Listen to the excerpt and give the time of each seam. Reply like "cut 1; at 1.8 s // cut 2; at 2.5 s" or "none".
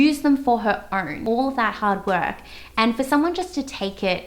cut 1; at 1.2 s